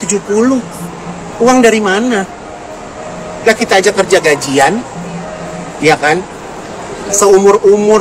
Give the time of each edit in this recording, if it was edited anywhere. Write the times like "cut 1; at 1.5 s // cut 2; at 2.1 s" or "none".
none